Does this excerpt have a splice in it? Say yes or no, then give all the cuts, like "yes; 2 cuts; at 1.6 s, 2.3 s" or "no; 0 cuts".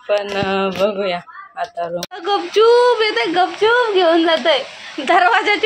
yes; 1 cut; at 2.1 s